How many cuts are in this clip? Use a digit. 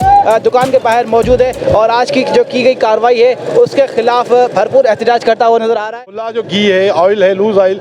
1